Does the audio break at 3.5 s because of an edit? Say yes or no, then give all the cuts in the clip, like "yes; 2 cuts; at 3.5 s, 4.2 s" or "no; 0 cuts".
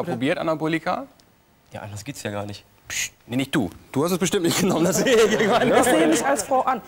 no; 1 cut; at 6.0 s